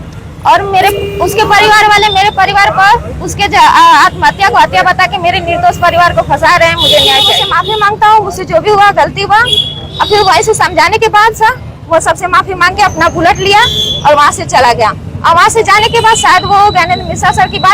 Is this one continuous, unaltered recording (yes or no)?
no